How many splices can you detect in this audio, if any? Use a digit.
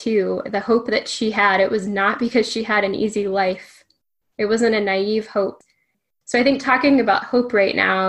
1